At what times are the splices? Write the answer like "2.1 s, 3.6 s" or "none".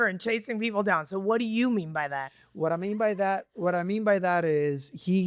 none